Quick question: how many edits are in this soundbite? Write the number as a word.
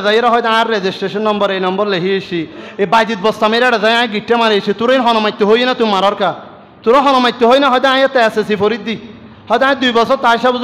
one